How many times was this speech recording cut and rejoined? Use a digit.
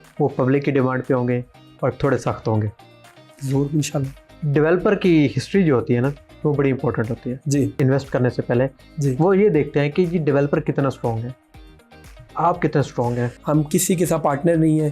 2